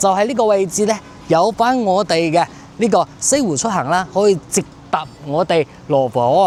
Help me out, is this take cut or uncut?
uncut